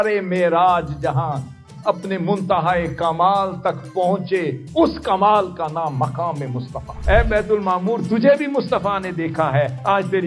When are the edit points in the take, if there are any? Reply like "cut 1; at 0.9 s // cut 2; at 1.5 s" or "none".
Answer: cut 1; at 7.0 s